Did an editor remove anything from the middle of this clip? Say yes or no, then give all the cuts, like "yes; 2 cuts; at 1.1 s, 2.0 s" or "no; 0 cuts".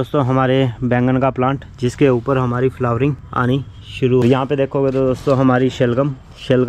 yes; 1 cut; at 4.2 s